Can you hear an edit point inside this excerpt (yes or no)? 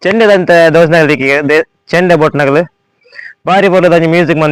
no